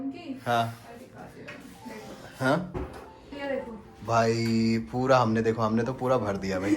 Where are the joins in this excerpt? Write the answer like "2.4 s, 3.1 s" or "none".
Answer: 2.7 s

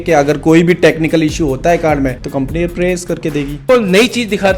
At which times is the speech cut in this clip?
2.2 s, 3.6 s

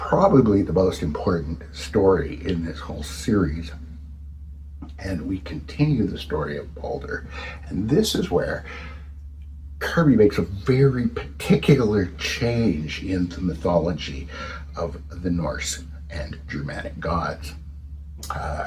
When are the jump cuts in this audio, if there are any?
none

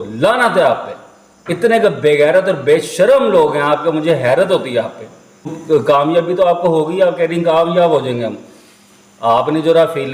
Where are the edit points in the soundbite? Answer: 5.5 s

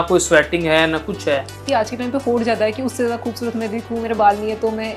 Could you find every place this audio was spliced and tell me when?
1.6 s

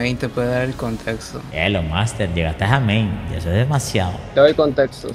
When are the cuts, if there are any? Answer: 1.4 s, 4.2 s

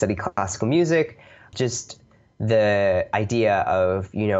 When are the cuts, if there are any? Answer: 1.4 s

